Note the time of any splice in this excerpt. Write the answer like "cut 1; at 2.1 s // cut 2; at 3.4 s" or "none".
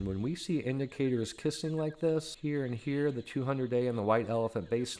cut 1; at 2.3 s